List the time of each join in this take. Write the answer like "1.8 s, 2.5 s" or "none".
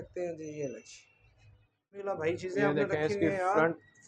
2.1 s